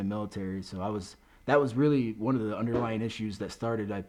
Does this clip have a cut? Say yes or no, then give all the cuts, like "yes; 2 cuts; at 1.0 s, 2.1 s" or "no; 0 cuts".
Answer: no; 0 cuts